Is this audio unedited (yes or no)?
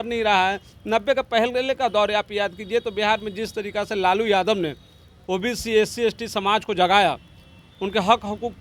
yes